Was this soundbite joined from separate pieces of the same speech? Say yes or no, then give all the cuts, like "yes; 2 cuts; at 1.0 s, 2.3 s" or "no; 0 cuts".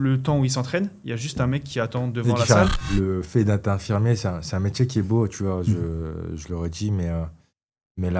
yes; 1 cut; at 2.8 s